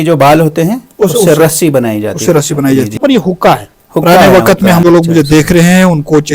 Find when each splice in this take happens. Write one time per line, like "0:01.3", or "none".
0:03.0
0:04.8